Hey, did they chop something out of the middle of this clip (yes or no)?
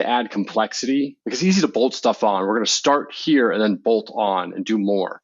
yes